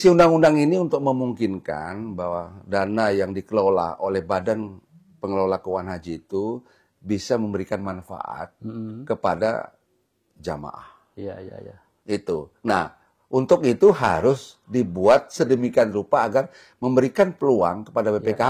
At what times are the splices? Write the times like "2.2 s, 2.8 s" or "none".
none